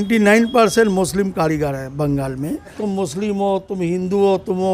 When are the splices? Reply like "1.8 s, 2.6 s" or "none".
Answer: 2.8 s